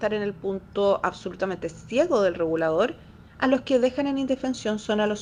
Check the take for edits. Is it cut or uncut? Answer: uncut